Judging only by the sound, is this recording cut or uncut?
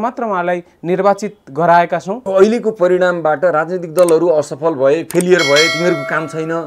cut